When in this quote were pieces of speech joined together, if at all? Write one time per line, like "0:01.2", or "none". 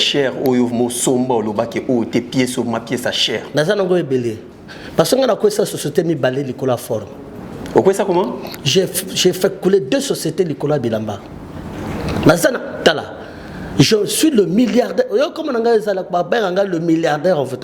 none